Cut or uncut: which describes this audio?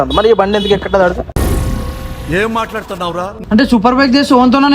cut